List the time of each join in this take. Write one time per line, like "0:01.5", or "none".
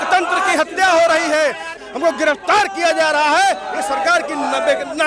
0:01.8